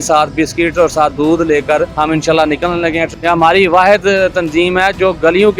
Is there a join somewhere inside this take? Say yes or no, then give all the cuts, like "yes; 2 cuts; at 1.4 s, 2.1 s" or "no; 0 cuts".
yes; 2 cuts; at 1.9 s, 3.1 s